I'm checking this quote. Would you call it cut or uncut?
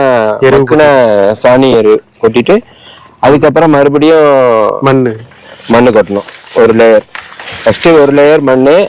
uncut